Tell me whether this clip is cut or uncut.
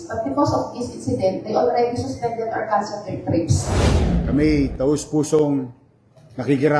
cut